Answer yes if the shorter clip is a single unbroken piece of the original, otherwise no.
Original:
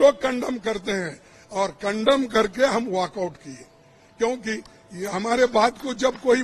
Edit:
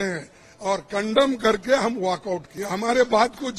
no